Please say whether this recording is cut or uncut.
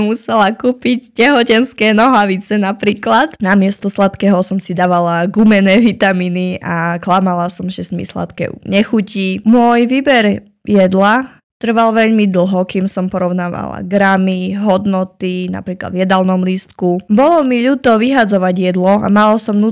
uncut